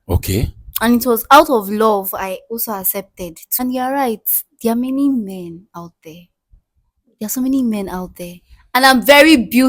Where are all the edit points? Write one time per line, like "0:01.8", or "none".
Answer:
0:03.6